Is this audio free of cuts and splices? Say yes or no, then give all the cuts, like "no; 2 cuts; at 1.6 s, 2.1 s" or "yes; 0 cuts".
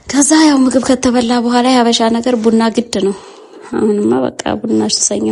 yes; 0 cuts